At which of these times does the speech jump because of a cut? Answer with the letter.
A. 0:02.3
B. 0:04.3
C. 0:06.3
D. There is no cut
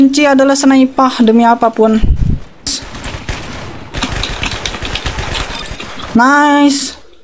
A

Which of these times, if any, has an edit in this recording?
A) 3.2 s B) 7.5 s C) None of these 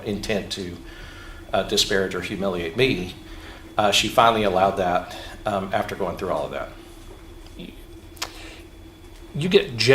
B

